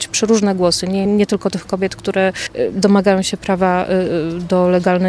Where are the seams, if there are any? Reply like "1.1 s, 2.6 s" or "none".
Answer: 1.1 s, 2.4 s